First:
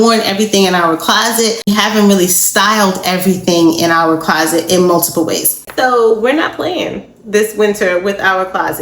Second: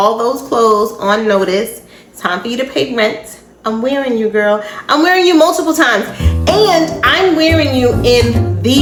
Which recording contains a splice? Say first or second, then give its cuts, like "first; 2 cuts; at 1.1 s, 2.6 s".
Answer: first; 2 cuts; at 1.7 s, 5.6 s